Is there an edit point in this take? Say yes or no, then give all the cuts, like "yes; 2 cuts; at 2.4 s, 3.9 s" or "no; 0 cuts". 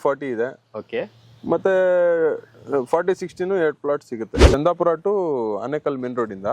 yes; 1 cut; at 4.4 s